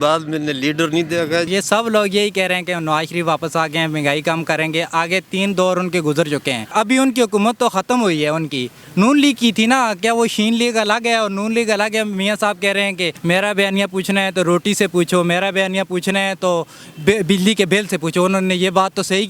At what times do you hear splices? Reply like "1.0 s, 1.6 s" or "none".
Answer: 1.5 s, 6.7 s, 13.2 s